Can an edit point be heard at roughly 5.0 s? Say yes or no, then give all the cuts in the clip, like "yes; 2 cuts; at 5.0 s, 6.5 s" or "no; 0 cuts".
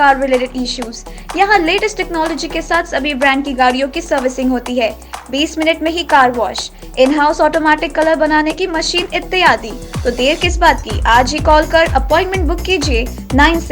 no; 0 cuts